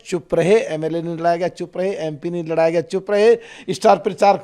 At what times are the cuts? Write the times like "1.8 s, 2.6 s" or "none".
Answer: none

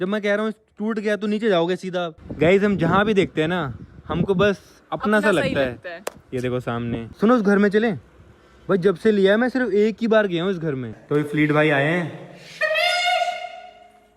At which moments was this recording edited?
2.2 s, 7.1 s, 10.9 s

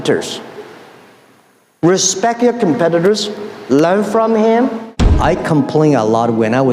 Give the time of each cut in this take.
5.0 s

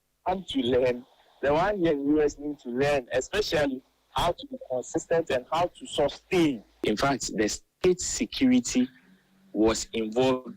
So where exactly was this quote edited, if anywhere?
6.7 s

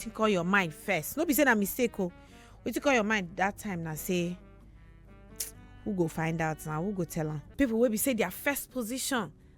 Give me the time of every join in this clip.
7.4 s

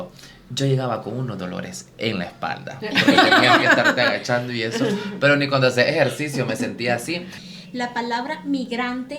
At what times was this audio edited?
7.4 s

